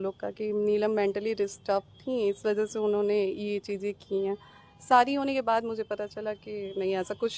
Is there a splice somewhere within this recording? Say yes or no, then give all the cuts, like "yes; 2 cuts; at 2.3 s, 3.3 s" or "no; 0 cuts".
no; 0 cuts